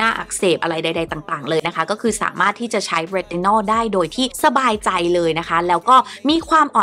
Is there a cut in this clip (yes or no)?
no